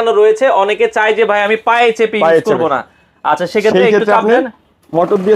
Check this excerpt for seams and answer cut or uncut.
uncut